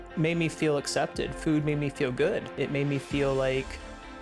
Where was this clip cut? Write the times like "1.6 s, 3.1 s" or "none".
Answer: 2.6 s